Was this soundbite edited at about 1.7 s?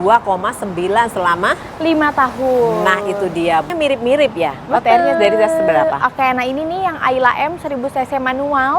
no; 1 cut; at 3.7 s

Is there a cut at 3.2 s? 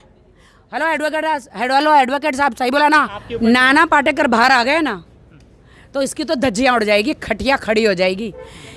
yes; 1 cut; at 3.2 s

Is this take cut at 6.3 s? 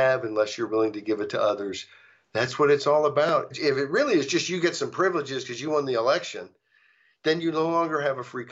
no; 1 cut; at 3.5 s

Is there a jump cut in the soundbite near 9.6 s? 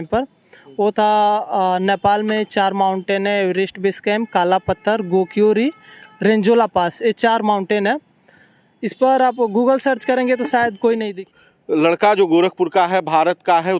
no; 1 cut; at 11.1 s

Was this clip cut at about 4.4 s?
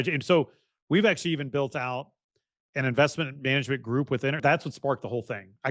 yes; 1 cut; at 4.4 s

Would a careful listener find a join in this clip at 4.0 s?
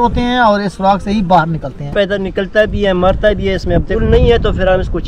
yes; 2 cuts; at 1.9 s, 4.0 s

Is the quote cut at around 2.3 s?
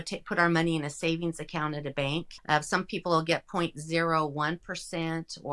yes; 1 cut; at 2.3 s

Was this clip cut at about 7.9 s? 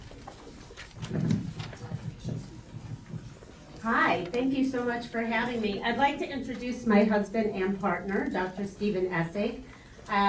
no; 1 cut; at 5.5 s

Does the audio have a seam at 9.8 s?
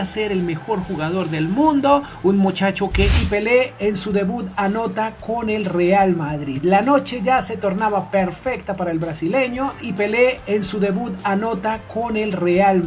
yes; 2 cuts; at 3.2 s, 9.8 s

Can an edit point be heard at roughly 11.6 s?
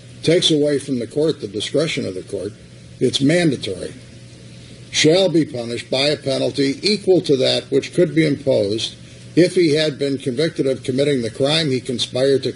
no; 1 cut; at 5.7 s

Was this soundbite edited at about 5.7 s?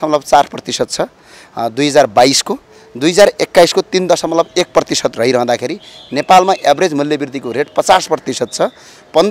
no; 0 cuts

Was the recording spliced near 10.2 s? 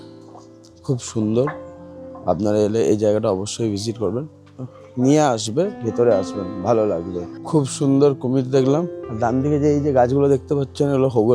no; 1 cut; at 7.3 s

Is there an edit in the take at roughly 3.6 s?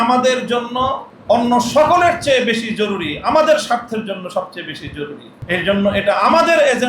no; 2 cuts; at 1.1 s, 5.3 s

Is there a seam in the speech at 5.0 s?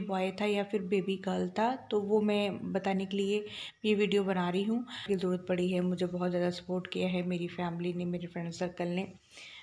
yes; 1 cut; at 5.0 s

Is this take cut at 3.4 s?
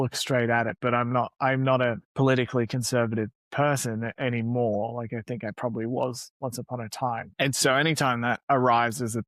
yes; 4 cuts; at 2.0 s, 3.4 s, 7.3 s, 8.4 s

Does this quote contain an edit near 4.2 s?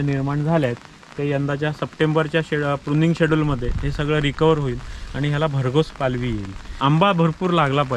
no; 1 cut; at 6.7 s

